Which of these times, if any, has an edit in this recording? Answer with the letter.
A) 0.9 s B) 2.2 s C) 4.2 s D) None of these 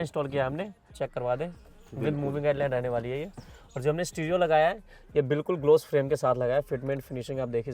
A